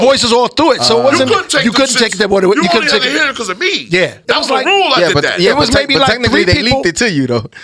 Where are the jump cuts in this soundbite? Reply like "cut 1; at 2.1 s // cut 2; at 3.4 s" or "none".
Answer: cut 1; at 4.2 s